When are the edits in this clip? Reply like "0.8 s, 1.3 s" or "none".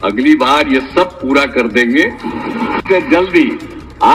2.9 s